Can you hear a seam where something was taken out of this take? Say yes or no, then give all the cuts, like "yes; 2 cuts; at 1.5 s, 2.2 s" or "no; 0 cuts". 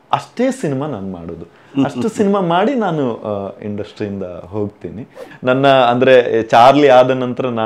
yes; 1 cut; at 5.2 s